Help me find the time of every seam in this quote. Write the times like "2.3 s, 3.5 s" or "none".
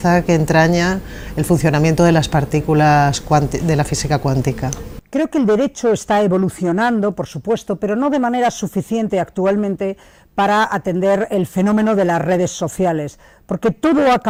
none